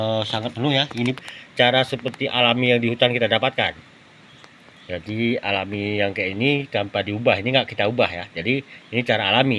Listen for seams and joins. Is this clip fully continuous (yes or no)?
no